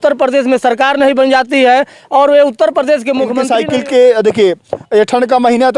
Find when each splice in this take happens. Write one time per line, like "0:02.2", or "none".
0:03.4